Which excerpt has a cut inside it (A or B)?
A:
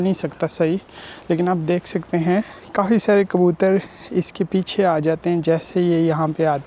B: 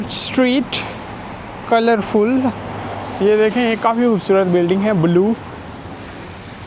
A